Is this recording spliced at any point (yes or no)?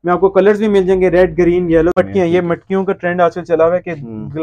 yes